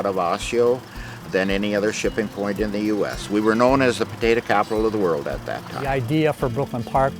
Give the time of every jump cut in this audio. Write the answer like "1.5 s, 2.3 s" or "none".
5.7 s